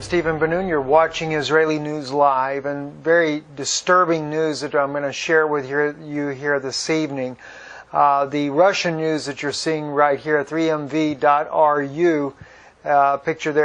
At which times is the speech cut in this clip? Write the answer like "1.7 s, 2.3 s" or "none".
none